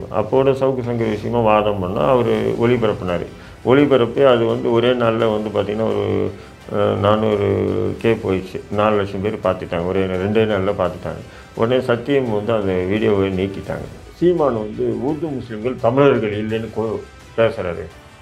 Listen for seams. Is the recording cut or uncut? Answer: cut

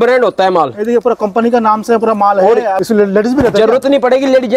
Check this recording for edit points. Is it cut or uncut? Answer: cut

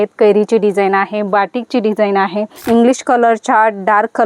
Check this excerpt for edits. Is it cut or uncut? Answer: cut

